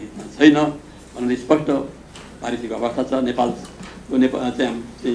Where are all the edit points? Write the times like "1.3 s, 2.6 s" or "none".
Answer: none